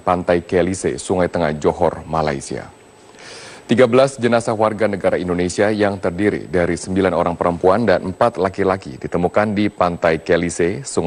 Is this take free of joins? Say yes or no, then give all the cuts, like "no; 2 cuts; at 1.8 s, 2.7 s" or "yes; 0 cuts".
yes; 0 cuts